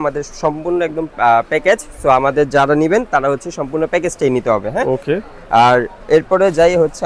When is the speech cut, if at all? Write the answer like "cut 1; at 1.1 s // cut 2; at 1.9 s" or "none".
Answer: none